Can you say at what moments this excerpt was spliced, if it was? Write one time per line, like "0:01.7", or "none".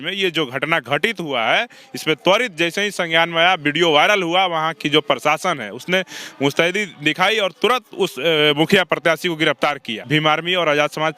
0:10.0